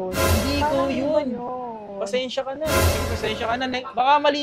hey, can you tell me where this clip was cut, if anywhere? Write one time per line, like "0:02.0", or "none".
0:02.8